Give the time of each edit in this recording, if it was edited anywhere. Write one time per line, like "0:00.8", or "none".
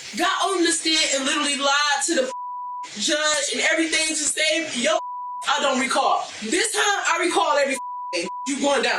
0:06.3